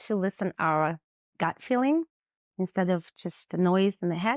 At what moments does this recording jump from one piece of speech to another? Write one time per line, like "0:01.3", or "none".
none